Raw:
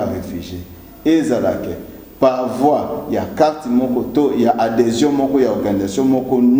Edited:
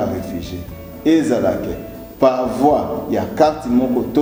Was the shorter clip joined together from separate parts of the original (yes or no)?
no